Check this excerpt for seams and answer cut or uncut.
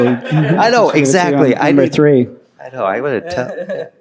uncut